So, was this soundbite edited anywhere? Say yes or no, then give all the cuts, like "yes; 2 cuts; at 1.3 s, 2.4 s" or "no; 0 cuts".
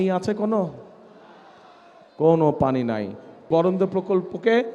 yes; 1 cut; at 3.5 s